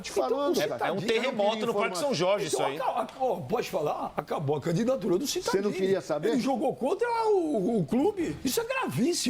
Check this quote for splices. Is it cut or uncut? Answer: cut